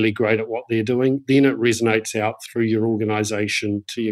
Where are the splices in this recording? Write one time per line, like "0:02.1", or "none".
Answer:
0:01.2